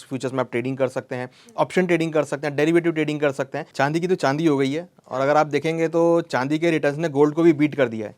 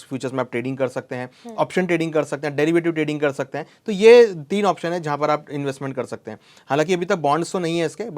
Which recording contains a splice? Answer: first; 1 cut; at 3.6 s

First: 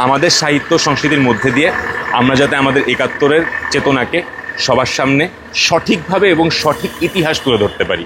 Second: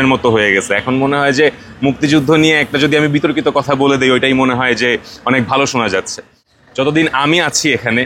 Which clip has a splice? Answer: second; 1 cut; at 6.5 s

